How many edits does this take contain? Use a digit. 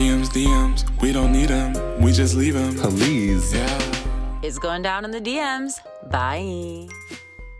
0